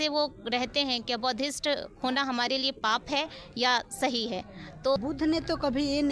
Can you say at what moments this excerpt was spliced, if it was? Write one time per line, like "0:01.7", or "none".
0:04.9